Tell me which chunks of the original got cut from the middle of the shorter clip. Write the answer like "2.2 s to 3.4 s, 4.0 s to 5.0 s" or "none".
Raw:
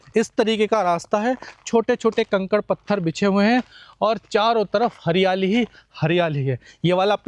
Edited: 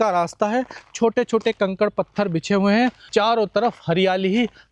3.8 s to 4.2 s